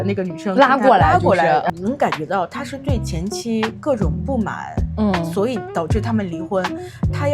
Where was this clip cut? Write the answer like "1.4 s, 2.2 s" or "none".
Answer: 1.7 s